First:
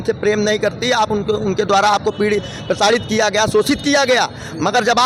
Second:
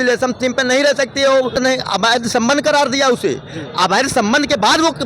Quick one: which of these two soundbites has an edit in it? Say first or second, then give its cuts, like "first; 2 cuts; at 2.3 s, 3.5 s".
second; 1 cut; at 1.6 s